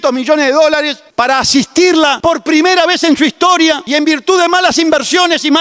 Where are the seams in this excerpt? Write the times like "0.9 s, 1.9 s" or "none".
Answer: 1.0 s, 2.2 s, 3.8 s